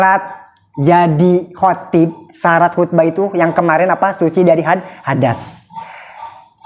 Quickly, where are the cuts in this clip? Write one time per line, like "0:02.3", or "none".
none